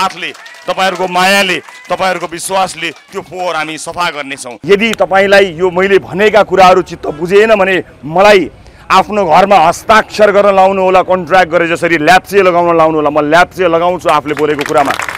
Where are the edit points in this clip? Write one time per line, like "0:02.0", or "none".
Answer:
0:04.5